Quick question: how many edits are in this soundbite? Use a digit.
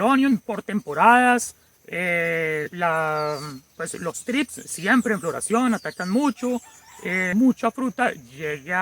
1